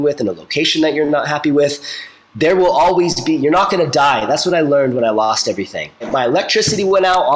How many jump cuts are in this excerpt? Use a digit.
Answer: 1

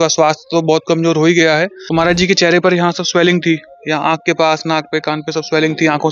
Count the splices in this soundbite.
1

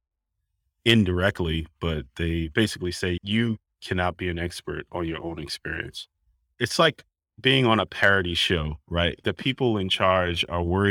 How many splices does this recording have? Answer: 3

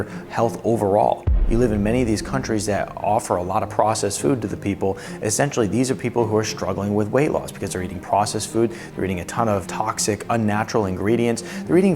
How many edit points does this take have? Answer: 2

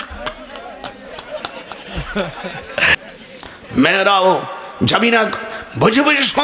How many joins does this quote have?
1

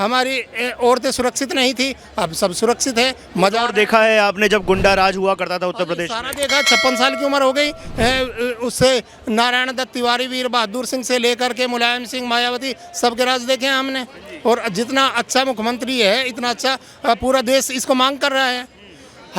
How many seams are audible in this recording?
0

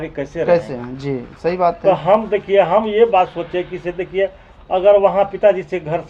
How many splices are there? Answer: 0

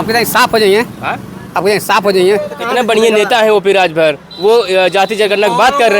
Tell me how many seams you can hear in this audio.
1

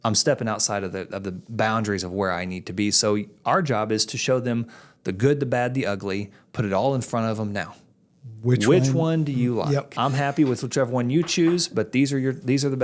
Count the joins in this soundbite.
1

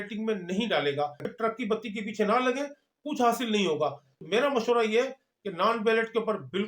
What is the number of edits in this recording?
2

